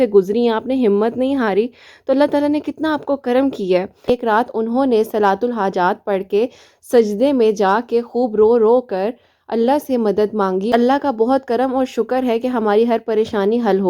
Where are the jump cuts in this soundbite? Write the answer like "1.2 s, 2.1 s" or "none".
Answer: 4.1 s, 10.7 s